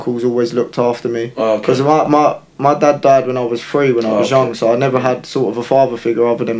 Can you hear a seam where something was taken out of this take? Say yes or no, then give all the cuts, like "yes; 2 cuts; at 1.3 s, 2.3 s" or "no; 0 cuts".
no; 0 cuts